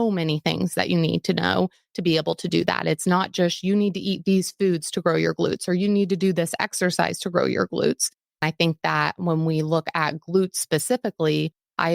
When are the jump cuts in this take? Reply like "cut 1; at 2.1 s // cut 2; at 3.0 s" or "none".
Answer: cut 1; at 8.4 s